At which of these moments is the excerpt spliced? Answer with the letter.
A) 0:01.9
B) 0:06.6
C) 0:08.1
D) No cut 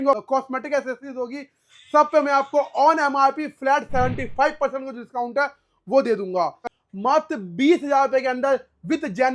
B